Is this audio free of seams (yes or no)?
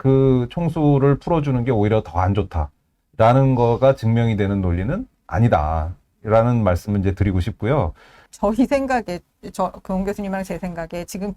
no